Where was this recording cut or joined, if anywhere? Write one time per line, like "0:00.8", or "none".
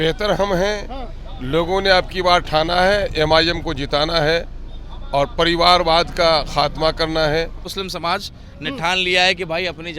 0:07.8